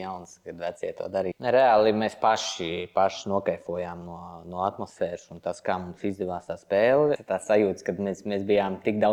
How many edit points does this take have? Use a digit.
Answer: 2